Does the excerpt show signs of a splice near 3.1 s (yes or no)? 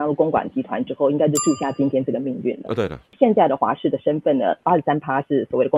yes